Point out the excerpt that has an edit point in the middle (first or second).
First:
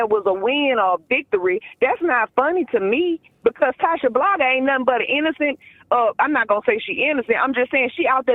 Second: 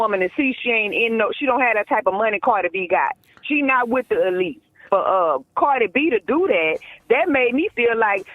second